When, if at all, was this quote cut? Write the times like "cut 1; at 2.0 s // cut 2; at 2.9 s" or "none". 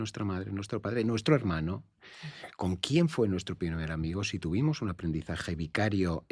none